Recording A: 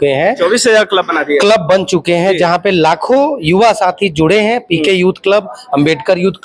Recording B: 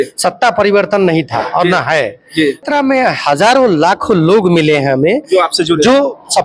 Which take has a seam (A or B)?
B